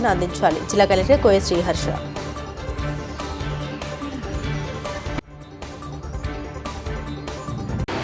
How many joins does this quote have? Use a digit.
1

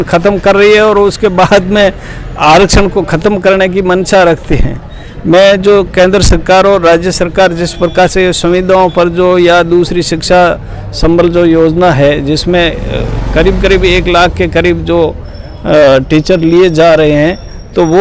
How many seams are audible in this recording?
0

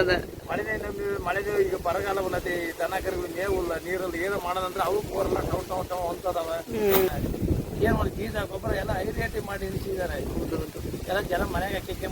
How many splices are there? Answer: 1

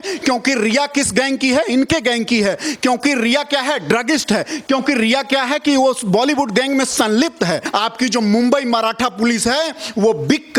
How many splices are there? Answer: 1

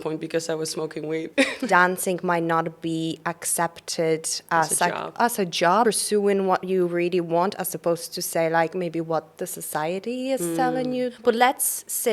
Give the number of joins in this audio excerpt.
3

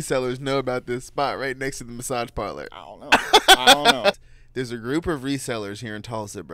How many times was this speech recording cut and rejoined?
1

